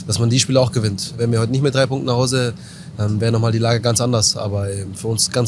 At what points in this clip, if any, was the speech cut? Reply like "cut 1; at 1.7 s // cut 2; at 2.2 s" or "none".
cut 1; at 1.1 s